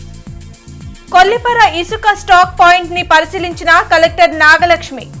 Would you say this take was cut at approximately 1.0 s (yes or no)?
no